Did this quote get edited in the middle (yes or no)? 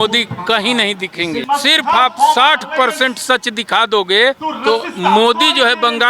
yes